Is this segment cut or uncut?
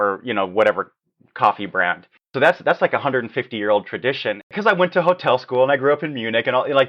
cut